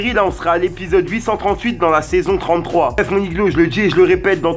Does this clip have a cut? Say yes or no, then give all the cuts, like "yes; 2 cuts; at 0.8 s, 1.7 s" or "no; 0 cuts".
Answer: no; 0 cuts